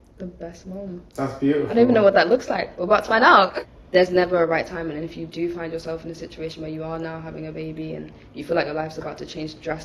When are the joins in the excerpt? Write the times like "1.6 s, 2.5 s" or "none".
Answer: 3.5 s